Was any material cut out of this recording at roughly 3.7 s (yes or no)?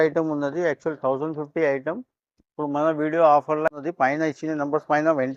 yes